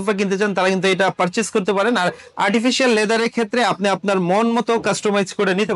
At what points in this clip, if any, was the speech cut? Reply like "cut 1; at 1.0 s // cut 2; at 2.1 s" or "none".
none

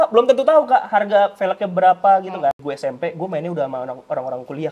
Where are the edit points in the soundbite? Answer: cut 1; at 2.7 s

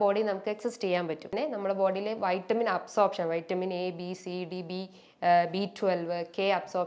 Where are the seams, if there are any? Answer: cut 1; at 1.4 s

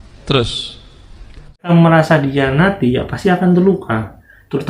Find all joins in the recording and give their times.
cut 1; at 1.7 s

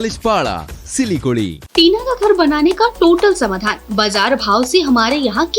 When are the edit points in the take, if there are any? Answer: cut 1; at 1.6 s

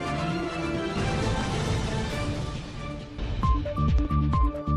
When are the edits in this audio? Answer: none

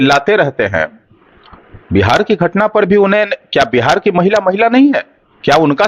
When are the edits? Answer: none

